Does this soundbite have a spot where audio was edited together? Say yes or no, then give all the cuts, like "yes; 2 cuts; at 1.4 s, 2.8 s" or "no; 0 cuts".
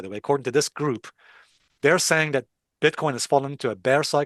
no; 0 cuts